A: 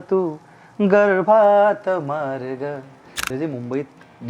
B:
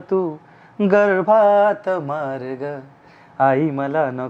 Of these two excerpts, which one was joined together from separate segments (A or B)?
A